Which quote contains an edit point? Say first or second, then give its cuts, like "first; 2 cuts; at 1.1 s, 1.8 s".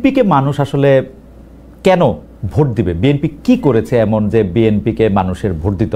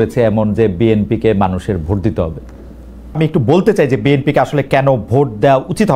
second; 1 cut; at 3.2 s